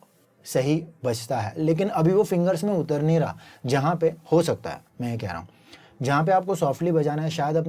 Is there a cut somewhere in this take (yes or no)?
no